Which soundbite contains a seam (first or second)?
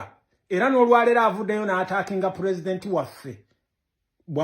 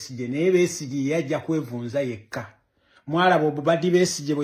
first